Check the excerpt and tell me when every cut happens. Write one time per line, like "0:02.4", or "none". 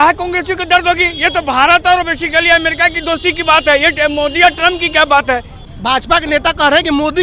0:05.5